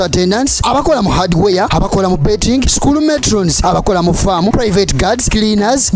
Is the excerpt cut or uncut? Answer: uncut